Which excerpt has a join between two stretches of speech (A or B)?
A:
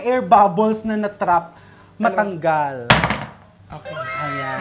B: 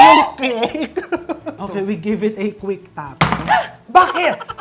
B